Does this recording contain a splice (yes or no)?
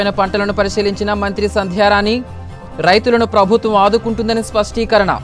no